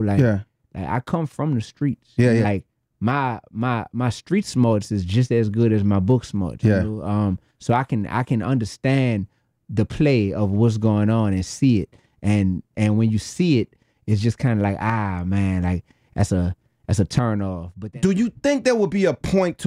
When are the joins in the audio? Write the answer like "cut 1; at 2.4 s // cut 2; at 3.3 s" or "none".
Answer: cut 1; at 2.4 s // cut 2; at 17.6 s